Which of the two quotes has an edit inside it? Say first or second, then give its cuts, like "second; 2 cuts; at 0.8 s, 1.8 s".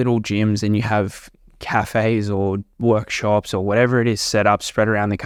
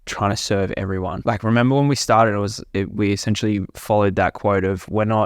second; 1 cut; at 1.2 s